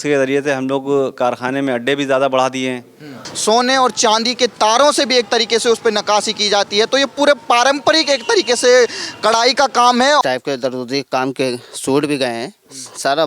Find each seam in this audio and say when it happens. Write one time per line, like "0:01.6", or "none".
0:03.3
0:10.2

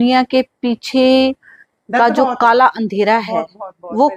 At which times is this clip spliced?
none

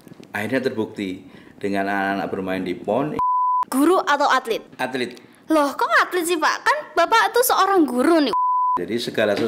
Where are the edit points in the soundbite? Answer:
0:03.2
0:04.7
0:08.5

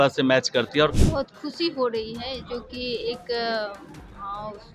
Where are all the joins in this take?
0:01.0

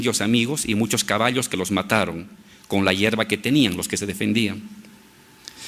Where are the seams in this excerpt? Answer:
0:04.0

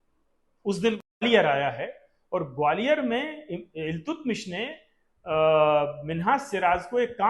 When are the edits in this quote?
0:01.2

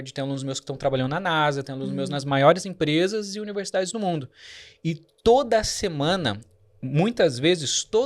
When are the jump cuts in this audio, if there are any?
none

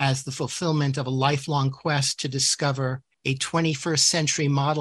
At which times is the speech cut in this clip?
none

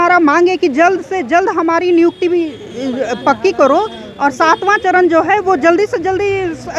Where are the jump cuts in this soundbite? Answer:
none

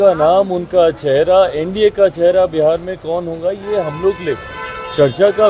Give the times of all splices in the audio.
none

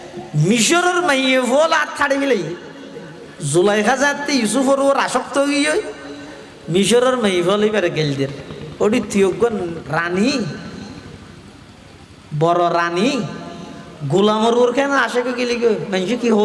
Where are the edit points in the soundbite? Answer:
0:09.8

